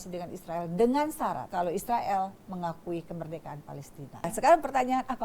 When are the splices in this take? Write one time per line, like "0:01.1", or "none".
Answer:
0:01.4
0:04.3